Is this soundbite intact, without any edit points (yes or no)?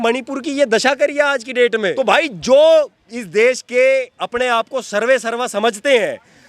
no